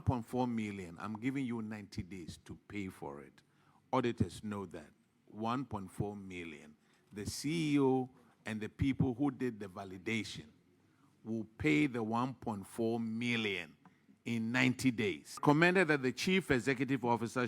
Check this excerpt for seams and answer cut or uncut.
cut